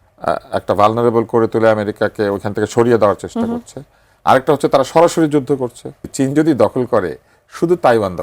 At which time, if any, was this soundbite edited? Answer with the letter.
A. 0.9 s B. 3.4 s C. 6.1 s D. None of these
C